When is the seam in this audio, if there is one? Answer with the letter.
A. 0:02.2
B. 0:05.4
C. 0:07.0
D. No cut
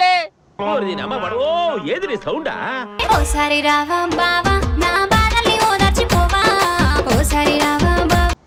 D